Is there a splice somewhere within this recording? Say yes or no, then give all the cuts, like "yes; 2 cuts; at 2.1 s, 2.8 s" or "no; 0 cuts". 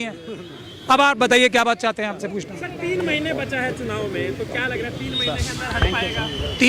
no; 0 cuts